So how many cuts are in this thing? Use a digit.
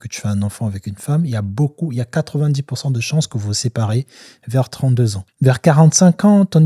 1